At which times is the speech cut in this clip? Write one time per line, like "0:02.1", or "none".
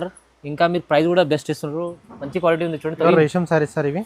0:03.0